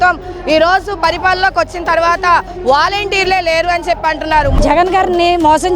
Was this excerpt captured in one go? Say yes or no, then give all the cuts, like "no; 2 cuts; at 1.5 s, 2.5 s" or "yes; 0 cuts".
no; 1 cut; at 4.5 s